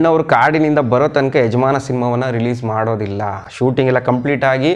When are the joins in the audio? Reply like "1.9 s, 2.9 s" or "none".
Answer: none